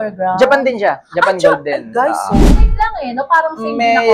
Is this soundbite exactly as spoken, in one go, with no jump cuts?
no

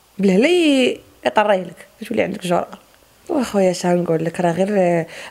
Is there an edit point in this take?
no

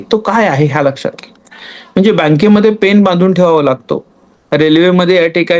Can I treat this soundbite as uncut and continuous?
yes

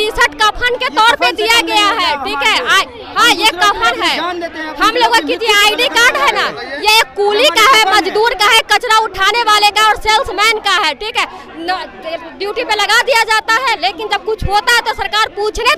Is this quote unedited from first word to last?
yes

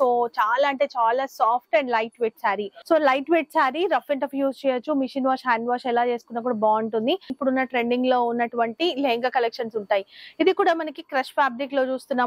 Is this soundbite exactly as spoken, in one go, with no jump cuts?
no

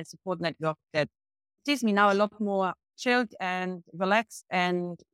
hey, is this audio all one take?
no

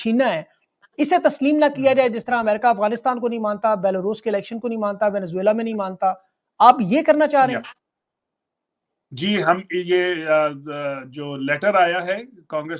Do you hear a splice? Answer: no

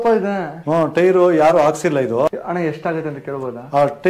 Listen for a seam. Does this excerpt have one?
yes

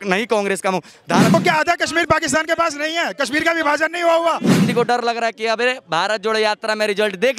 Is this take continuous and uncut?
no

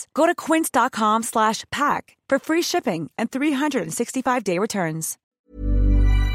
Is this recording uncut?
no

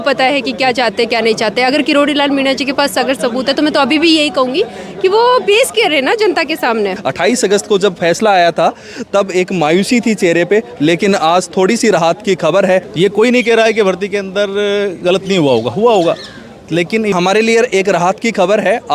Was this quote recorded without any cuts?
no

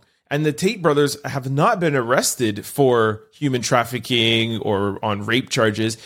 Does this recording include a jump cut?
no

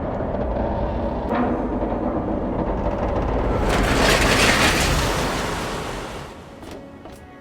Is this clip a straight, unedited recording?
yes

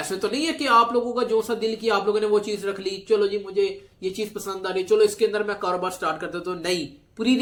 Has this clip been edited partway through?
no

